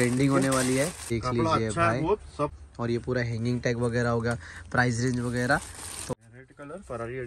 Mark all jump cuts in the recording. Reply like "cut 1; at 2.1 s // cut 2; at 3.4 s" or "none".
cut 1; at 1.1 s // cut 2; at 2.6 s // cut 3; at 6.1 s